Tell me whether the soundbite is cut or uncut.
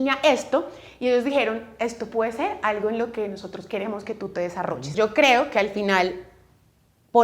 cut